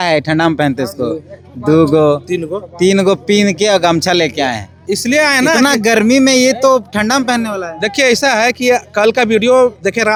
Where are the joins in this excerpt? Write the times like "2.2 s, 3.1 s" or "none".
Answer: none